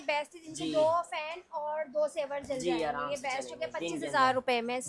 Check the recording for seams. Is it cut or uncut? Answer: uncut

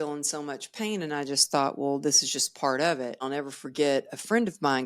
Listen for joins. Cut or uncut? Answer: cut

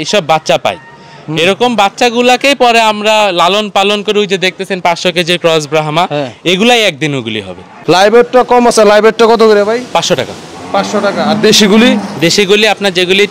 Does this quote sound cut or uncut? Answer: cut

